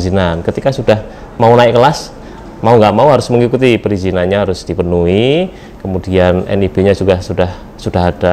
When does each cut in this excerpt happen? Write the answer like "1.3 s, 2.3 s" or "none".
none

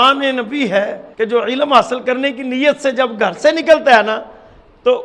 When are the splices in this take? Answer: 1.0 s

